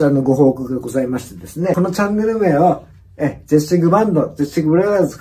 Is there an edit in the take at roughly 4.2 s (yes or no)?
no